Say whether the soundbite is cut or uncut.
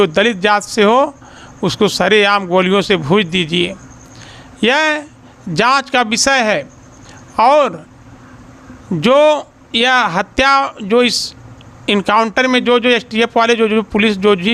uncut